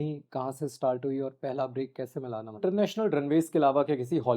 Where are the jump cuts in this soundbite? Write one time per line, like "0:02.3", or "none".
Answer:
0:02.6